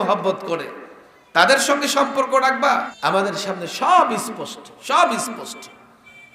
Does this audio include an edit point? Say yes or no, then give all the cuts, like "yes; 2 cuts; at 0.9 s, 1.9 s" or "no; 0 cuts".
yes; 1 cut; at 2.9 s